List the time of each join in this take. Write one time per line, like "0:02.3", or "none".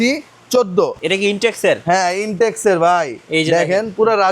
0:01.0